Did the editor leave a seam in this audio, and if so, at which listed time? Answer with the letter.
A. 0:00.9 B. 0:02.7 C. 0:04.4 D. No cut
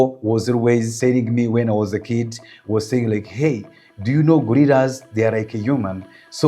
A